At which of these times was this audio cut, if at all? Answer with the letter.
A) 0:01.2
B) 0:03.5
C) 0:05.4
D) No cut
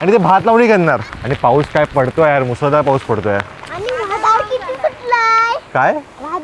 A